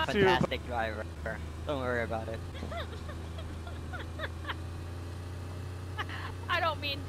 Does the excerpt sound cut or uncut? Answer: cut